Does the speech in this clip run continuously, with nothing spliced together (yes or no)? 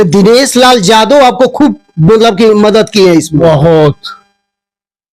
yes